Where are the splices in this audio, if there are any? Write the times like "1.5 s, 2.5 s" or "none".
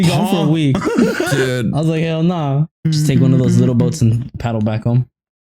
2.7 s

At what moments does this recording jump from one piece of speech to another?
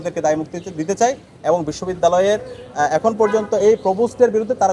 none

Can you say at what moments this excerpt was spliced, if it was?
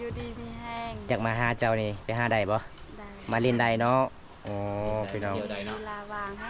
1.1 s

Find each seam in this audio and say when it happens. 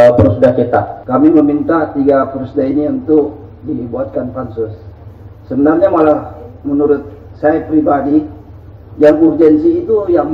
1.0 s

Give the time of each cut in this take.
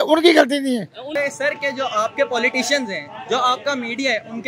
1.1 s

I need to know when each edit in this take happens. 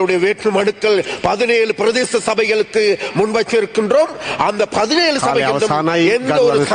none

